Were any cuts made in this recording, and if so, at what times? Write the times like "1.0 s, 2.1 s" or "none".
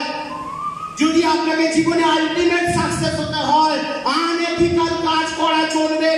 none